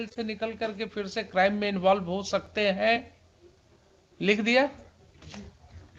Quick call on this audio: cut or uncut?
uncut